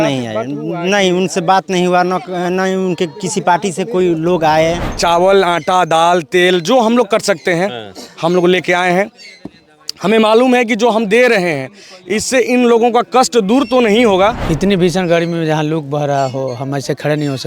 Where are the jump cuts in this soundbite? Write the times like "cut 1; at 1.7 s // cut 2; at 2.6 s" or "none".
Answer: cut 1; at 4.9 s // cut 2; at 14.4 s